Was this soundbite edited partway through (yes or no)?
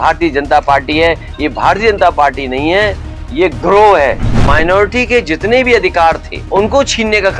yes